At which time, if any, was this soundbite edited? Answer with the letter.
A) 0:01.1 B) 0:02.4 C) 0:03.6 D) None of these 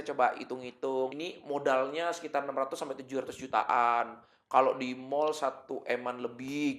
A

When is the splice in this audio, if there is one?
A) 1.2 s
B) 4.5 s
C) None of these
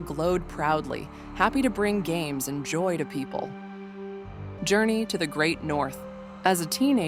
B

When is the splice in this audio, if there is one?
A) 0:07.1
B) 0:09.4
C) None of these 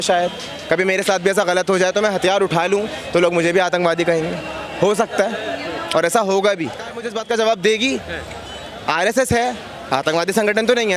A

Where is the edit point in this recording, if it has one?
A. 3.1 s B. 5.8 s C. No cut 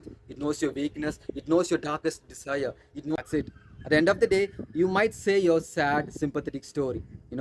A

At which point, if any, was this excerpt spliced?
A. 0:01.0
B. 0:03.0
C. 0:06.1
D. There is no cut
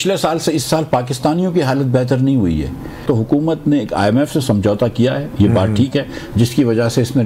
B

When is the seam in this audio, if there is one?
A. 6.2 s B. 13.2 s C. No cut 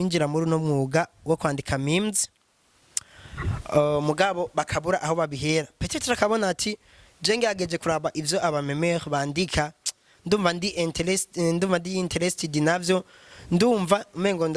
C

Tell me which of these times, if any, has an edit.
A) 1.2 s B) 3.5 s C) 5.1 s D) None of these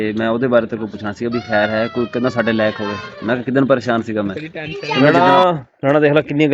C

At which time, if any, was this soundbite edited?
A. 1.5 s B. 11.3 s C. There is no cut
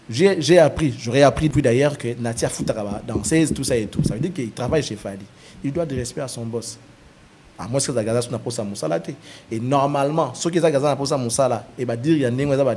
A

